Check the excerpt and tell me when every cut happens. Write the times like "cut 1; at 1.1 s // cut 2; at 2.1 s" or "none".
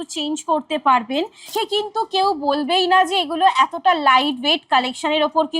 cut 1; at 1.5 s

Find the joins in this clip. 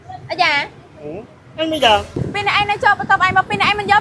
cut 1; at 2.2 s

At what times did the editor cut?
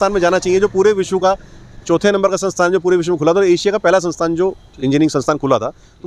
none

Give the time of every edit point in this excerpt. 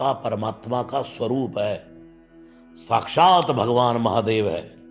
none

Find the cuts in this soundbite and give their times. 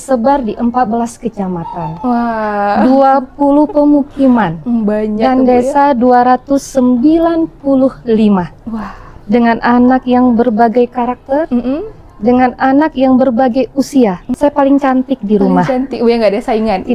cut 1; at 14.3 s

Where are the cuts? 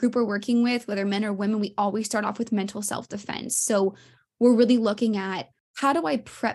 none

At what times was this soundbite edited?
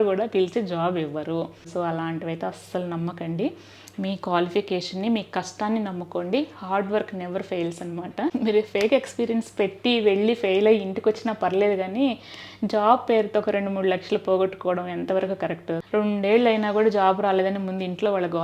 cut 1; at 1.7 s // cut 2; at 8.3 s // cut 3; at 15.8 s

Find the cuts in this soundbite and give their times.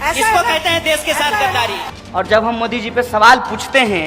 cut 1; at 1.9 s

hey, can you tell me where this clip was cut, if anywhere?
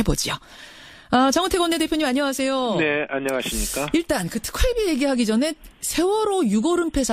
cut 1; at 5.6 s

